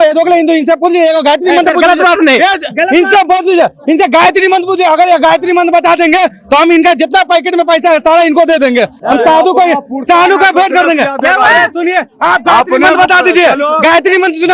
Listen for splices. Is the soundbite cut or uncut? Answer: uncut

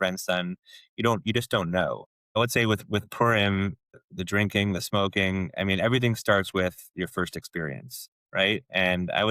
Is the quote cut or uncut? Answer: cut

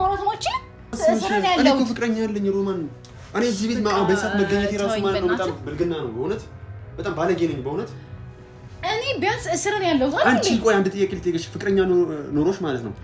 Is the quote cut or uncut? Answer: cut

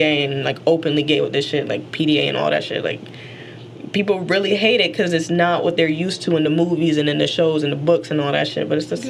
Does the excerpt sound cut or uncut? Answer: uncut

